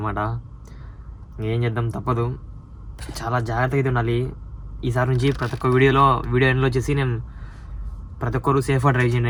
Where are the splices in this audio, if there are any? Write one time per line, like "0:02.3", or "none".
none